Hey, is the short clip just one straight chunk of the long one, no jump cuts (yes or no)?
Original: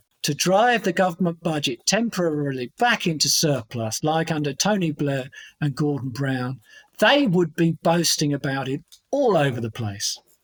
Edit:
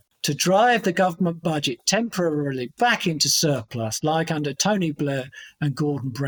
yes